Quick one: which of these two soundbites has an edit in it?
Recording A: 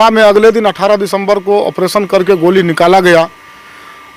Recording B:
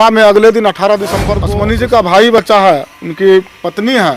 B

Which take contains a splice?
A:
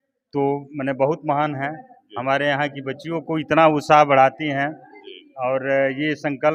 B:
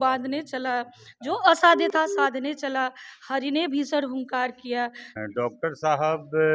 B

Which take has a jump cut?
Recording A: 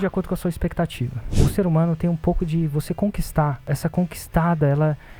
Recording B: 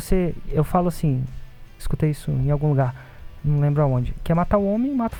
A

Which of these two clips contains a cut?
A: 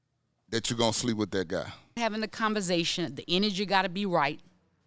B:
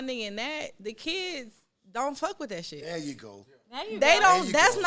A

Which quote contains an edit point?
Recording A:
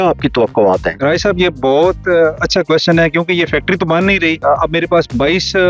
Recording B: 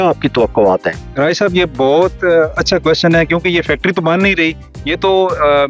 A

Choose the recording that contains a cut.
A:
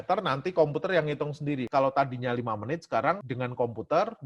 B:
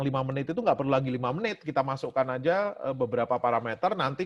A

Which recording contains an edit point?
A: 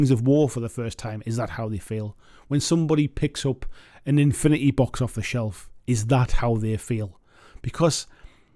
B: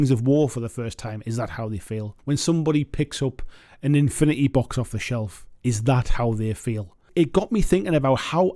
B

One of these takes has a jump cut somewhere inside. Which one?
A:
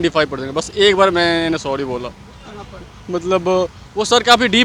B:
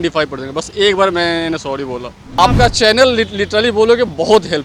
B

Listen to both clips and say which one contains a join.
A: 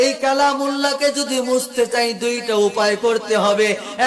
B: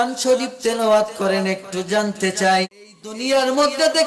B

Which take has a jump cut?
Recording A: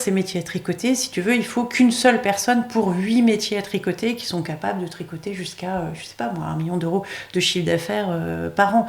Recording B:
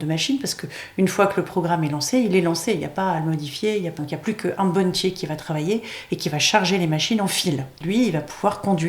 B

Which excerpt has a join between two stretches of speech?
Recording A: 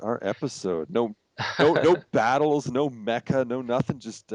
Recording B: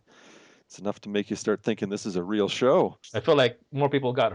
B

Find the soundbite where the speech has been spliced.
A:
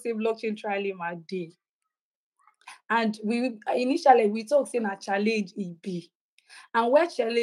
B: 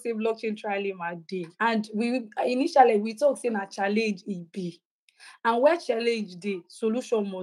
B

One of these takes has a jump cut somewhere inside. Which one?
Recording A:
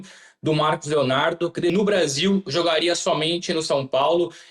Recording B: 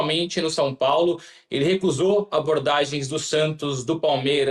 A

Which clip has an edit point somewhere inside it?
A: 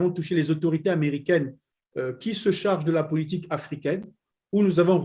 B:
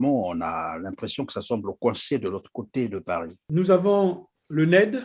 B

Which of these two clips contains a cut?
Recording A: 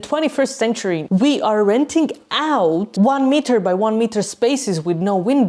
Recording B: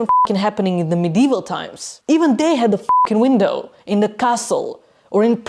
A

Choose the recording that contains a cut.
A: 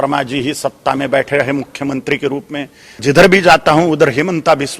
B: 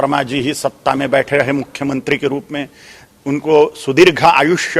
A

